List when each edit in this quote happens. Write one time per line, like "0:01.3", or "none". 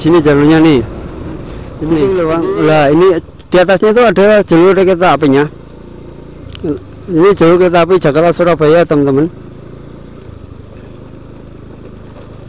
0:02.0